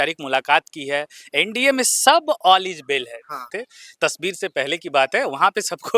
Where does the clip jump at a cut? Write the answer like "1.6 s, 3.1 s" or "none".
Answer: 3.5 s